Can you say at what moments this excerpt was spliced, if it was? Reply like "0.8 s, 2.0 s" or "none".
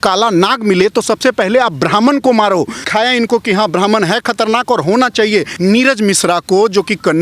2.8 s, 5.5 s